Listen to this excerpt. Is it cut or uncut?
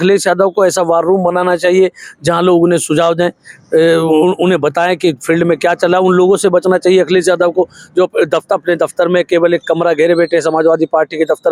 uncut